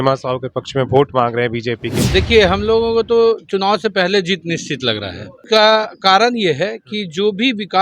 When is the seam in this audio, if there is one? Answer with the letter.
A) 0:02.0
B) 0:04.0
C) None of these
A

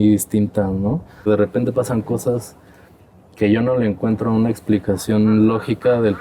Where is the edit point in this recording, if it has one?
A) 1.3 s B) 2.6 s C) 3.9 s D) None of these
A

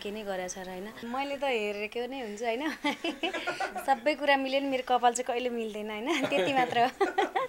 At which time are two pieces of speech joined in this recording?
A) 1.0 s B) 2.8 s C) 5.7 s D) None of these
A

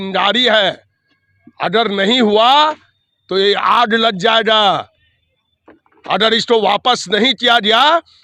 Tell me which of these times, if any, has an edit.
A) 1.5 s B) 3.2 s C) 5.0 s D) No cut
D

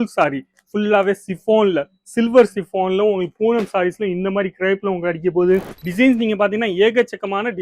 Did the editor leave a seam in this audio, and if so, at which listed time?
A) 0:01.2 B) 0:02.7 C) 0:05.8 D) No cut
C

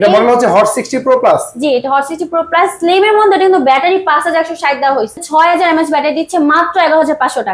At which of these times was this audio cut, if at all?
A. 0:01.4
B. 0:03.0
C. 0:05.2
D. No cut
C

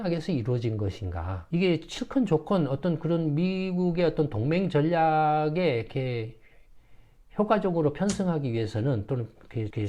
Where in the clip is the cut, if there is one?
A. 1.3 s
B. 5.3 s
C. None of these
A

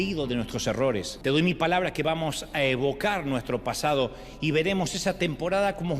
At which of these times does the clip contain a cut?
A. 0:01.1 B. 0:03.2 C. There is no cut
A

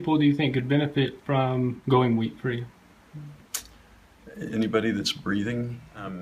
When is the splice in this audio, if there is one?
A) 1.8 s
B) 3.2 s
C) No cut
A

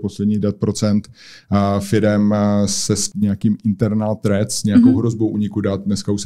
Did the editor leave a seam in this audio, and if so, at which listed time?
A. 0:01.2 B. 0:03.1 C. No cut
B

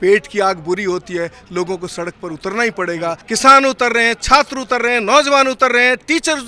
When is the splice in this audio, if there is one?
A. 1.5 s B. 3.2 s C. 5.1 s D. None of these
B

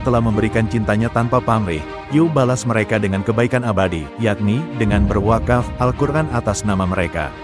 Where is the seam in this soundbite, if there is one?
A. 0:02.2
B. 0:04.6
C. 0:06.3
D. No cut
D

